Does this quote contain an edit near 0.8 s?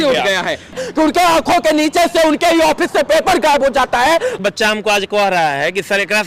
yes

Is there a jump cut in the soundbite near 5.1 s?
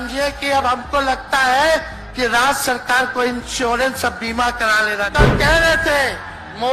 yes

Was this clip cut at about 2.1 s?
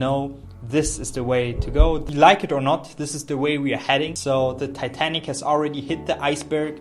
yes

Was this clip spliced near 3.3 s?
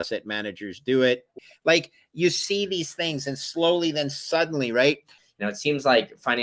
no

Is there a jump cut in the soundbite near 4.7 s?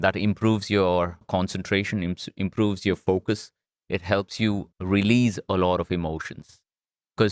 yes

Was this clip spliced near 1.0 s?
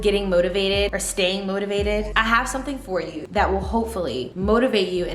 yes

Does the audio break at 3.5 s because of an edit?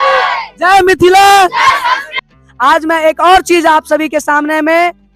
no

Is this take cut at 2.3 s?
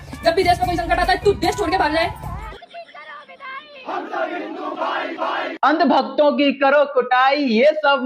yes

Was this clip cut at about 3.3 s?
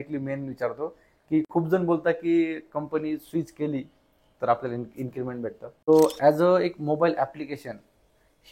no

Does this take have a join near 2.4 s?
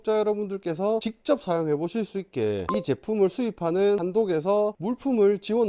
no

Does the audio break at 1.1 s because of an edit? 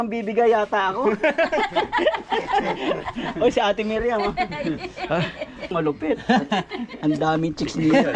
no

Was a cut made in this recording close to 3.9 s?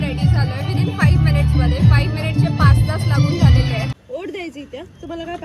yes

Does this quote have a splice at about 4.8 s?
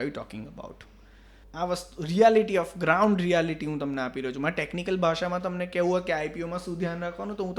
no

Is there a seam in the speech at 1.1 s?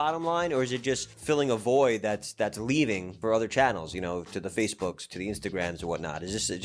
yes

